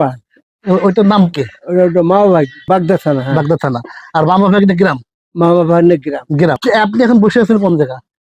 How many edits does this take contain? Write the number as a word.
two